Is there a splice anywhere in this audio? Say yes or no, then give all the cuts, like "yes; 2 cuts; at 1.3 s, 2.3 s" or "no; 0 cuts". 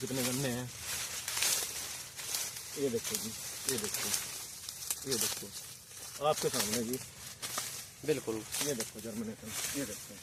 no; 0 cuts